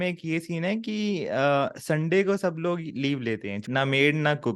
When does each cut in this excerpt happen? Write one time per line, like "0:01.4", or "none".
0:03.6